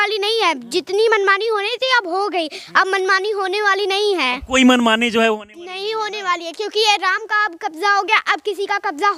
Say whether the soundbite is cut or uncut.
uncut